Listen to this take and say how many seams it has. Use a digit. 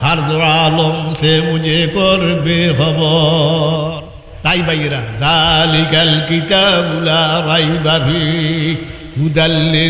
1